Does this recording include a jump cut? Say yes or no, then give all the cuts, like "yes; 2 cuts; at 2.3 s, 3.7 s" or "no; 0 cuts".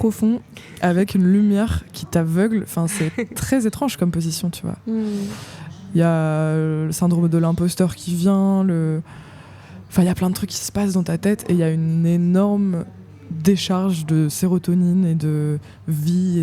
no; 0 cuts